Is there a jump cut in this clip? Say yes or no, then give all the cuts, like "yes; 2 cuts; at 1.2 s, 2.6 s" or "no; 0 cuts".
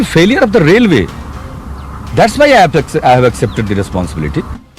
no; 0 cuts